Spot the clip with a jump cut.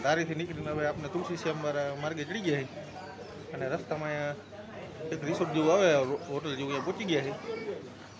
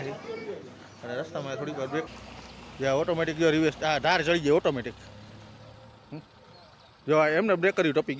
second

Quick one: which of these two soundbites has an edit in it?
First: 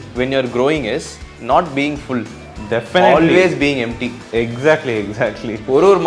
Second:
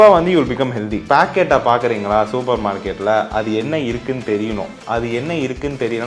second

